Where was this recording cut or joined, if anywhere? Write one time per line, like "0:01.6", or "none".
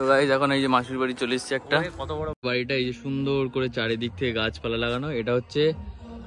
0:02.4